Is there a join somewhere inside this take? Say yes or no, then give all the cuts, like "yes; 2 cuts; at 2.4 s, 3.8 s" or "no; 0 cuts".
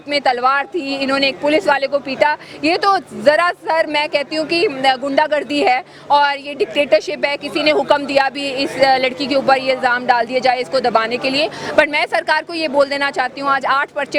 no; 0 cuts